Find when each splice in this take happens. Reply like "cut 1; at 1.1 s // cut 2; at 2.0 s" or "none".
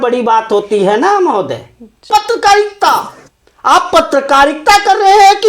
cut 1; at 2.1 s